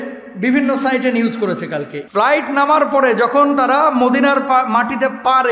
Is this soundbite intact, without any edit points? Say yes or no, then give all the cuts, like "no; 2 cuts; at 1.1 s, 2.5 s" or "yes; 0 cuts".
no; 1 cut; at 2.0 s